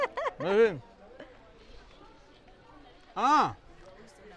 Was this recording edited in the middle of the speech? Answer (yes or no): no